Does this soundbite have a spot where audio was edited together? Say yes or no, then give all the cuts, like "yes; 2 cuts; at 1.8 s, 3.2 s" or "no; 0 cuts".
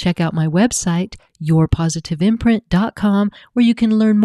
no; 0 cuts